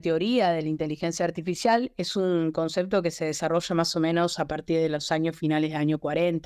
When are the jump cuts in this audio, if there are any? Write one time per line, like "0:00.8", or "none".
none